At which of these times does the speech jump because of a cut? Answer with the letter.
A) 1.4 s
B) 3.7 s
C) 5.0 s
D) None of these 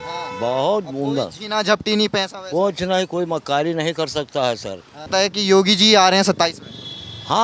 C